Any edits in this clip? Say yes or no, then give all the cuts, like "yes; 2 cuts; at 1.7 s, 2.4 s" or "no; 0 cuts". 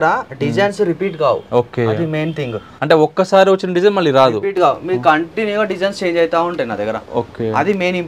no; 0 cuts